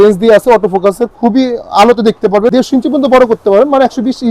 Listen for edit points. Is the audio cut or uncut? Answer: cut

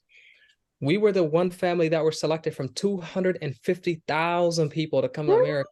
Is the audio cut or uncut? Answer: uncut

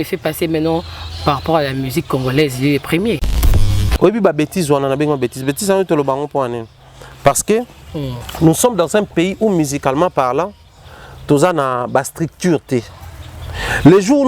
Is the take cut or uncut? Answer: cut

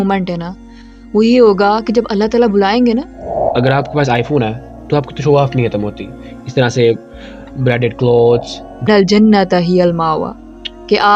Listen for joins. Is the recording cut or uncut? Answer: cut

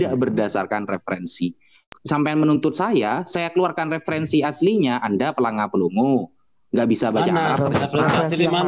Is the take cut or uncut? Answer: cut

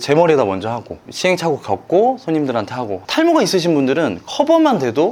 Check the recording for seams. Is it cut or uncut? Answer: uncut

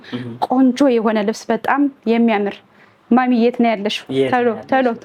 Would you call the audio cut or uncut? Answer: uncut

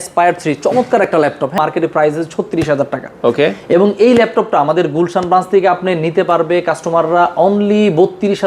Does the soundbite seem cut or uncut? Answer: cut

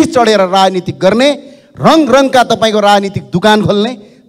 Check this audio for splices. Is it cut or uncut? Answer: uncut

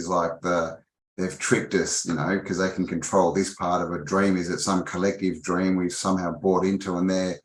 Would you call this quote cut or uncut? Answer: uncut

